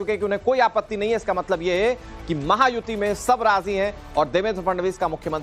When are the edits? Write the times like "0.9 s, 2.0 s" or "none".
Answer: none